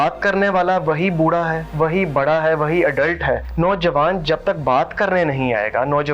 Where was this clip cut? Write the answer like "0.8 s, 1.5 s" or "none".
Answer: 1.6 s, 3.5 s